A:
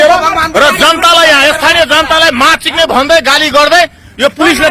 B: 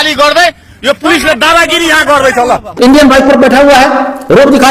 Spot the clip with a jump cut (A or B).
B